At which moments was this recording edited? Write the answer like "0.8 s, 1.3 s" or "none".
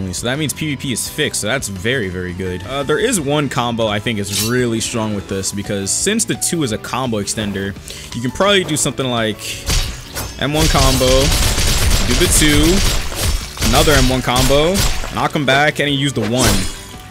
2.7 s